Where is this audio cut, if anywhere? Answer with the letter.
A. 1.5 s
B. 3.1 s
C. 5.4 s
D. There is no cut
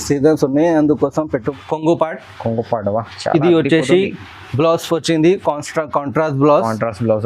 A